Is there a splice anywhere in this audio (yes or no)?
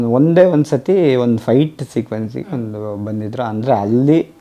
no